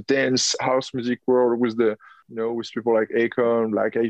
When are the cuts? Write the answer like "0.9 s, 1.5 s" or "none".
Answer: 2.1 s